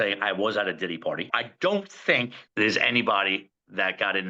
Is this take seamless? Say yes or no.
no